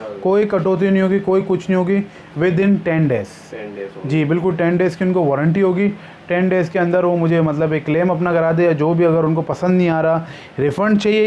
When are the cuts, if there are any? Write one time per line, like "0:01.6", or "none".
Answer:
none